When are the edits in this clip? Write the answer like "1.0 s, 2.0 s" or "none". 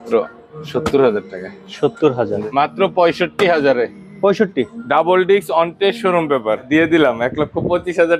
2.3 s, 6.6 s